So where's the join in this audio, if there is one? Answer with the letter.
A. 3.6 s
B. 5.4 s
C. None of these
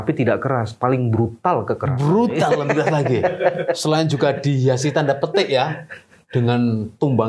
C